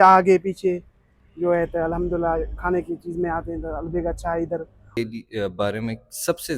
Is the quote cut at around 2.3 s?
no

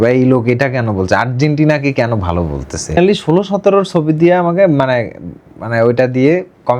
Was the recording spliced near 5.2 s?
no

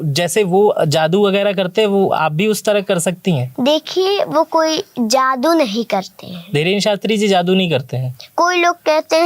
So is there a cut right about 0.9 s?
no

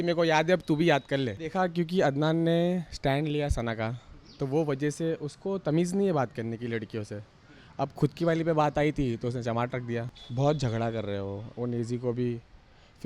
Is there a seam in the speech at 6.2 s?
no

